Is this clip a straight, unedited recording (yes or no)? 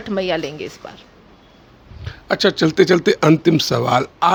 yes